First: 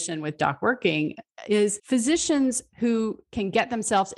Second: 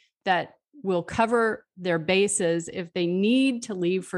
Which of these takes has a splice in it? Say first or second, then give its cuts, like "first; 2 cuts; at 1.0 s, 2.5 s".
first; 1 cut; at 1.8 s